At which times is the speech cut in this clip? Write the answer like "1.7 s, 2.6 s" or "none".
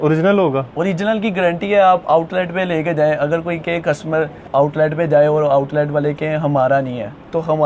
none